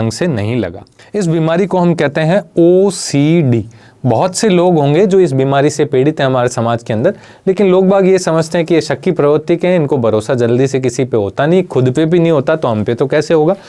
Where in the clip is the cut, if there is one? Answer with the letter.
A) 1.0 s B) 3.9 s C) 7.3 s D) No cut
A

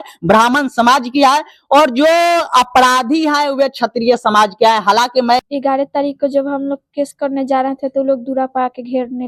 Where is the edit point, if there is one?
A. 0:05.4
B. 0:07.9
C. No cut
A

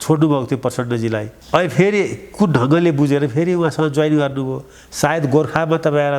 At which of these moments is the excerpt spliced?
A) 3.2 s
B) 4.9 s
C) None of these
C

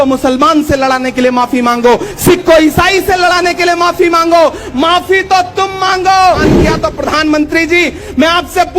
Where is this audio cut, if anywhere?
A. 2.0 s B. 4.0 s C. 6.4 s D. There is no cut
C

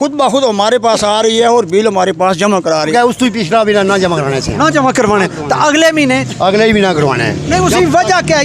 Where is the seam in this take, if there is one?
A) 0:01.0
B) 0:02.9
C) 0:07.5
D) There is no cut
B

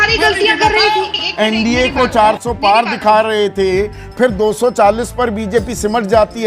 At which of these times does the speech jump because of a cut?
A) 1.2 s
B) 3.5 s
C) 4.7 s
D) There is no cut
A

